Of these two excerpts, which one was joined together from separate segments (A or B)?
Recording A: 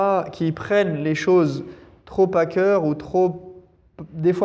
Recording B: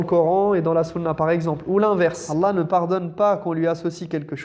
B